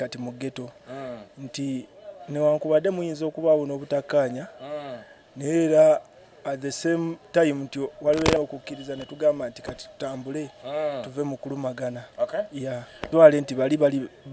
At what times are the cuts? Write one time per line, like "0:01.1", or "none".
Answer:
0:08.4
0:13.1